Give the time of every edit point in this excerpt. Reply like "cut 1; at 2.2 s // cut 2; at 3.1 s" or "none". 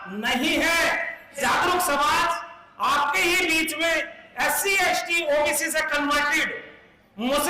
cut 1; at 1.4 s